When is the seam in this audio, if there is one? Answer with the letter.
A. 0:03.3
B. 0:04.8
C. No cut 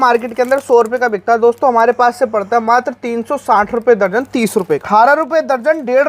B